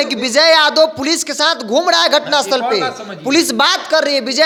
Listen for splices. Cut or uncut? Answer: uncut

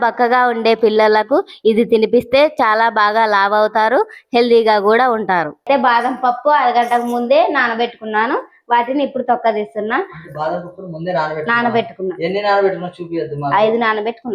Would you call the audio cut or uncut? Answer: cut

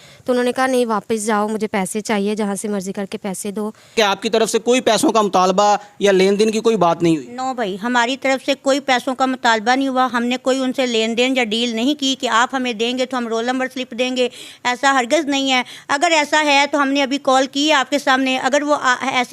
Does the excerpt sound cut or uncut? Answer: cut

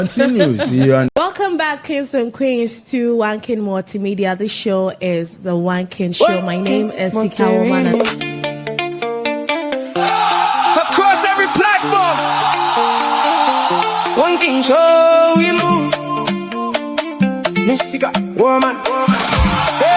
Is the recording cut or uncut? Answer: cut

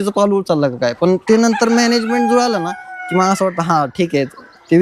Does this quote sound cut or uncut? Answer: uncut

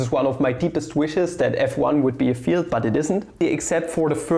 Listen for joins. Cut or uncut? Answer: cut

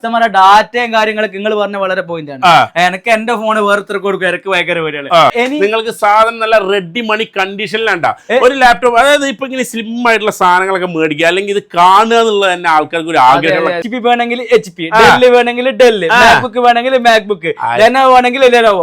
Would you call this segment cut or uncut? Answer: cut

